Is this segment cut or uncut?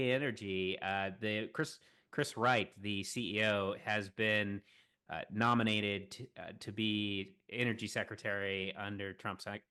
uncut